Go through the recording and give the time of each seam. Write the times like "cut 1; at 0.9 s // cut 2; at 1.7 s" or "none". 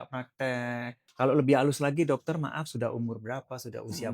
cut 1; at 1.0 s